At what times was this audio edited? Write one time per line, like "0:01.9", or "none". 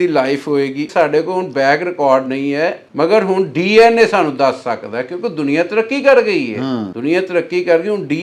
0:00.9
0:02.8
0:06.9